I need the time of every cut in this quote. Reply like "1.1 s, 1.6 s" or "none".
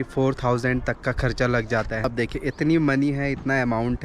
2.0 s